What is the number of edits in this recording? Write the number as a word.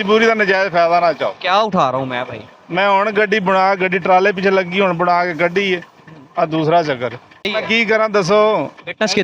one